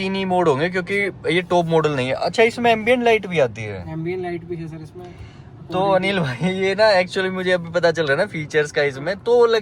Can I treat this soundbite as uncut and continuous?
yes; 0 cuts

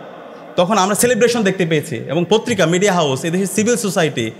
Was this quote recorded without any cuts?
yes; 0 cuts

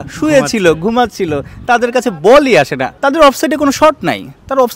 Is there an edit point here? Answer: yes; 1 cut; at 2.9 s

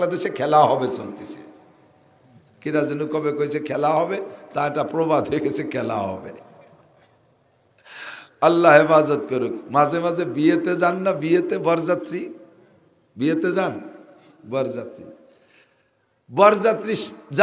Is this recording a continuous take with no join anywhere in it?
yes; 0 cuts

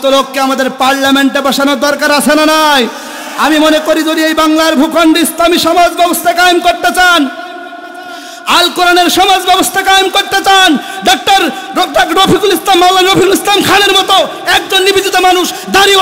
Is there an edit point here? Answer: no; 0 cuts

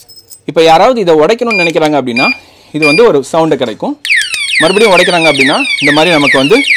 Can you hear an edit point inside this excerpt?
no; 0 cuts

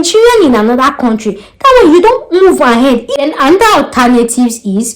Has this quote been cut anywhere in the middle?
yes; 1 cut; at 3.1 s

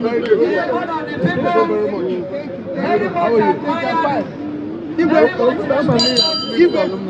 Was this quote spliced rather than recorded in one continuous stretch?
no; 0 cuts

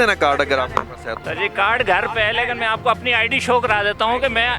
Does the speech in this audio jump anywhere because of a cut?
yes; 1 cut; at 1.1 s

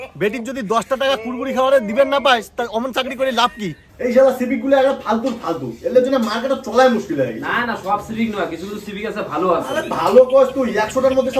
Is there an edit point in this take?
yes; 1 cut; at 3.9 s

